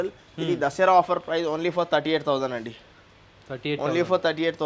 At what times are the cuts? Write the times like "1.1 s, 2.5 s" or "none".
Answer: none